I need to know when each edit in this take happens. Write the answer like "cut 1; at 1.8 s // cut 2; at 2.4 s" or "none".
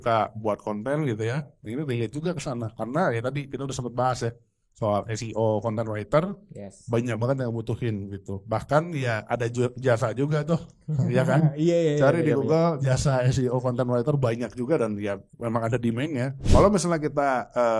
cut 1; at 16.4 s